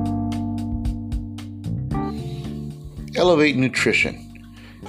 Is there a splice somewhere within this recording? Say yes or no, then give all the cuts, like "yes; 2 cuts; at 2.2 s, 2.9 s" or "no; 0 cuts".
yes; 1 cut; at 2.7 s